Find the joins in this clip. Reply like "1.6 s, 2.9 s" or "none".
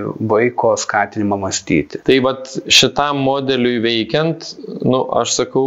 1.9 s